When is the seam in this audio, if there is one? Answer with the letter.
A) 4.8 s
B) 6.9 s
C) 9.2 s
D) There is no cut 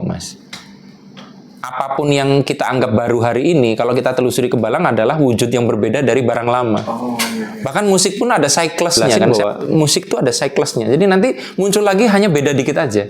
C